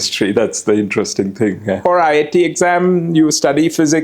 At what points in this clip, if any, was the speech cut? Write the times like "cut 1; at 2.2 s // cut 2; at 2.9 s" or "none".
cut 1; at 1.8 s